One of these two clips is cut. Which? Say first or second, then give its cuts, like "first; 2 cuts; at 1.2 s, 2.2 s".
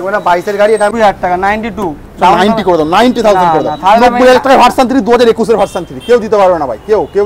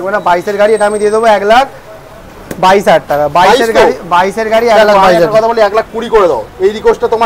first; 1 cut; at 0.9 s